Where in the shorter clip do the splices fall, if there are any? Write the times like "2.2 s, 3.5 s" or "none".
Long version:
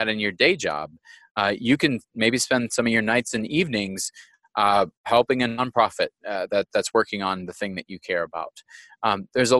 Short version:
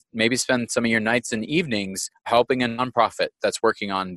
2.2 s, 3.4 s